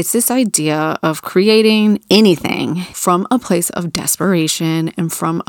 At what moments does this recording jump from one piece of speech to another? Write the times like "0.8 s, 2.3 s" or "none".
2.9 s